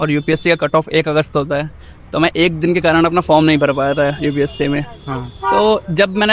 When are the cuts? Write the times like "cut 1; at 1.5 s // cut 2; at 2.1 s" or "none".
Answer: none